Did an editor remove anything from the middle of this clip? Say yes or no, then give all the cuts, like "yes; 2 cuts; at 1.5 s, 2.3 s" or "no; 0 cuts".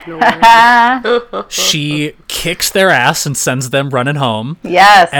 no; 0 cuts